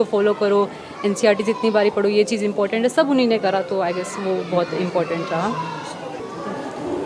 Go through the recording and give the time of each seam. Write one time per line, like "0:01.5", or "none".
0:06.2